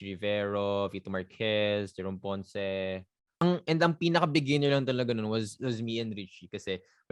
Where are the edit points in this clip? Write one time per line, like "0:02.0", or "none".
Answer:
0:03.4